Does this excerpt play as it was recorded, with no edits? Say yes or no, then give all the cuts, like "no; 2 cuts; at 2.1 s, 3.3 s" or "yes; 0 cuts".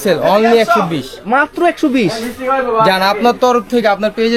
yes; 0 cuts